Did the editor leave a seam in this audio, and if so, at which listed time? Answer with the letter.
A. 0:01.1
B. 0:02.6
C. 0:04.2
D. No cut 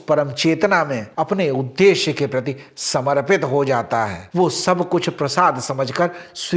D